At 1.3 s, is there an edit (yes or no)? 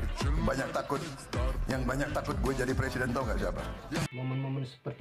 no